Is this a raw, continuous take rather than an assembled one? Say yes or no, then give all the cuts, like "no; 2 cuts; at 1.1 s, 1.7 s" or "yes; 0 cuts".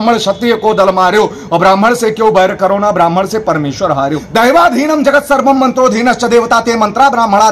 no; 1 cut; at 4.2 s